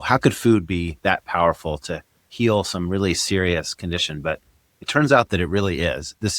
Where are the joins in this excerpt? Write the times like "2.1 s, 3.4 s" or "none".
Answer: none